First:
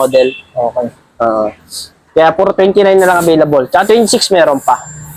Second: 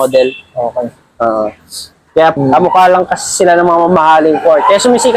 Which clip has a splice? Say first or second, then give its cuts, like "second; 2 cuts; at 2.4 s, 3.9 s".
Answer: second; 1 cut; at 2.4 s